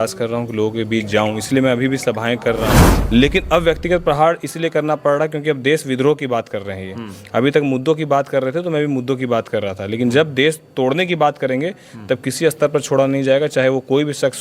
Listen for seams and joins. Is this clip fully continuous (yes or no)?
no